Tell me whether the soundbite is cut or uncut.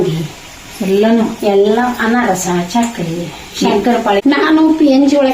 cut